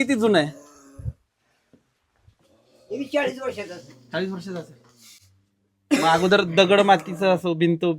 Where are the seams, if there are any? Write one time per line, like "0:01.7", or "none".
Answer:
none

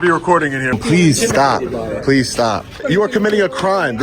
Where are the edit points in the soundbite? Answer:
0:00.7
0:02.8

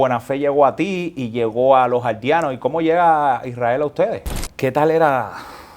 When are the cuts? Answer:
0:04.5

